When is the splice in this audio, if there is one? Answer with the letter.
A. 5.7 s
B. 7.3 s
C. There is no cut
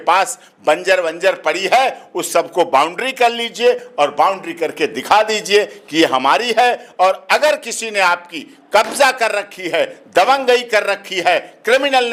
C